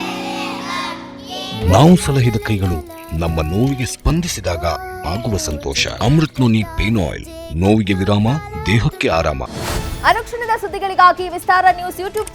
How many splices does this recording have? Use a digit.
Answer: 0